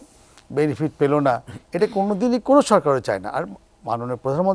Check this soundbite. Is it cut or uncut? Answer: uncut